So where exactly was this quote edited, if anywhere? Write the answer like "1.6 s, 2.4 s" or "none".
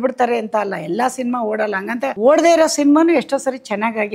2.1 s